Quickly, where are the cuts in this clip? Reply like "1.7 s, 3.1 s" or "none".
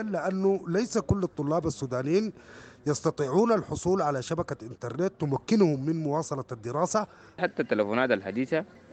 7.4 s